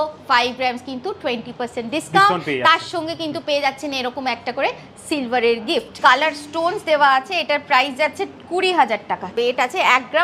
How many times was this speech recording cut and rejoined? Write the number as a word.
two